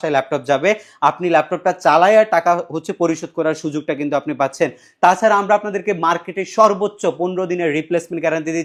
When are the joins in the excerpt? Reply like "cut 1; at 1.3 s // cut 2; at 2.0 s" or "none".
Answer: none